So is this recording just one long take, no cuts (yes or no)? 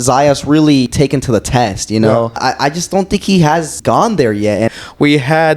no